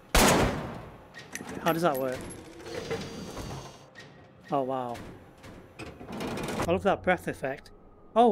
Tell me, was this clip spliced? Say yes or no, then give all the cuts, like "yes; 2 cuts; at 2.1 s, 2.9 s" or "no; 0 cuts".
yes; 1 cut; at 6.6 s